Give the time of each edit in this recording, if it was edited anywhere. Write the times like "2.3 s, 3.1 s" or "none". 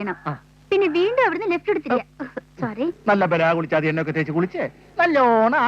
3.0 s